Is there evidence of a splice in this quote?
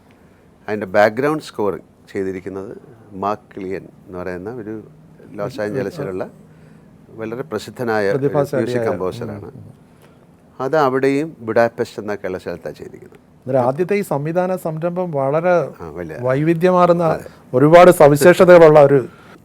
no; 0 cuts

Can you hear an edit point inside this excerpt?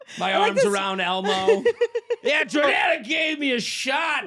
yes; 1 cut; at 2.6 s

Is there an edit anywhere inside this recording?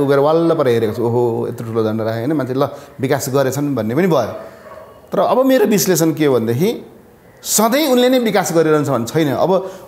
no; 0 cuts

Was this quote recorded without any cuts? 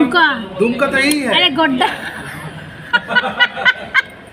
yes; 0 cuts

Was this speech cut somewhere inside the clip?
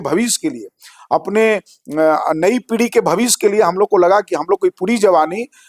no; 0 cuts

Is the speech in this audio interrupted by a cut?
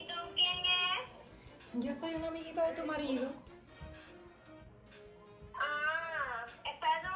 no; 0 cuts

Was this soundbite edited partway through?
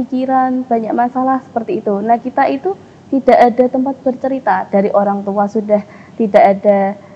no; 0 cuts

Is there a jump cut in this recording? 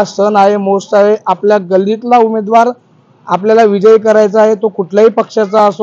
no; 0 cuts

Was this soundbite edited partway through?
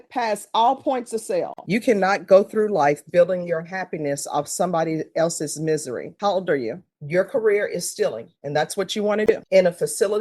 yes; 3 cuts; at 1.6 s, 6.9 s, 9.3 s

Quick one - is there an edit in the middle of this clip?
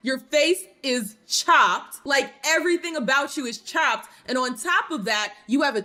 no; 0 cuts

